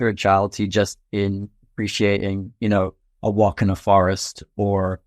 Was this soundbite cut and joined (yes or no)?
no